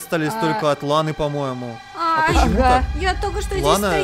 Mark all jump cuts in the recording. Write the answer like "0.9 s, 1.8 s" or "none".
2.9 s